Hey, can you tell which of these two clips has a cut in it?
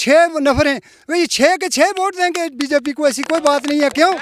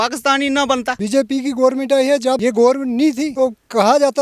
second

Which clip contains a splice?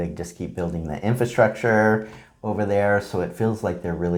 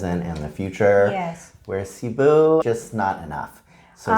second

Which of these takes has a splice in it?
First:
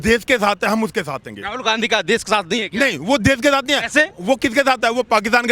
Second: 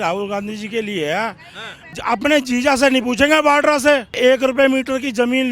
second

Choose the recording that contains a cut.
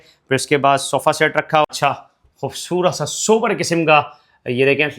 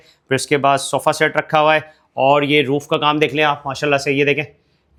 first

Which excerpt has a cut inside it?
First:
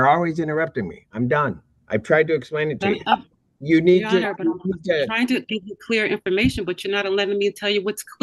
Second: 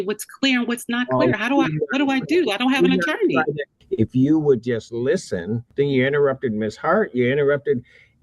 second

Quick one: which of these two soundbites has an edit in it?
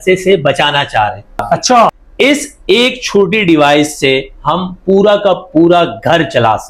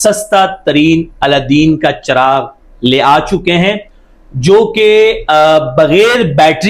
first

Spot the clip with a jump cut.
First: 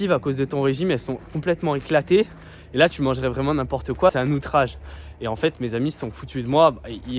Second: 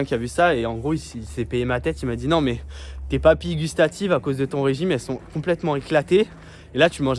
first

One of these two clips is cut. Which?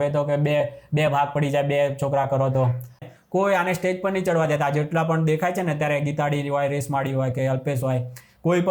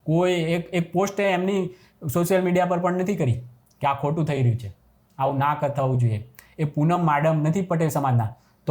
first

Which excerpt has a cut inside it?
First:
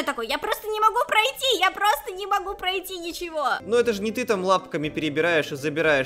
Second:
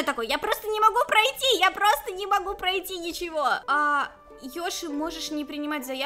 first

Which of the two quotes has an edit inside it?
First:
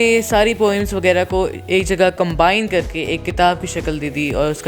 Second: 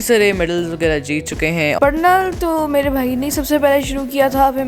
second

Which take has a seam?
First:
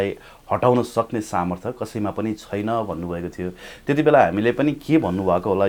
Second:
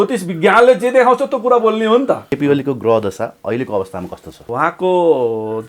second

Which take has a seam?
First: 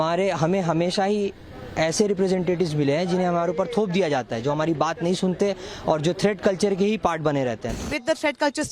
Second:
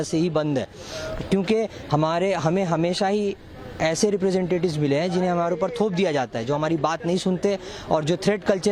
first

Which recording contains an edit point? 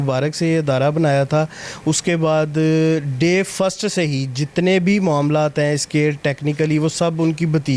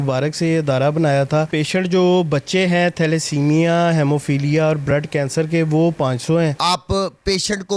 second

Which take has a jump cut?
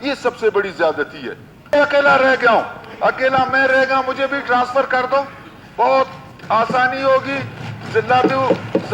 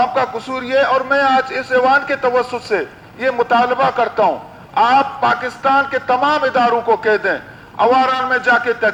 first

